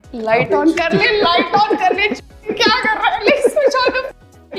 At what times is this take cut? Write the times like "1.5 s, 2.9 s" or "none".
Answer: none